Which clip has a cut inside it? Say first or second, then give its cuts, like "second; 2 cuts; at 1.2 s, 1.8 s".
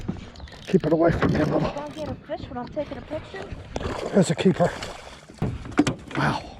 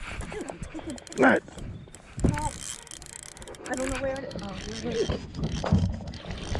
first; 1 cut; at 5.4 s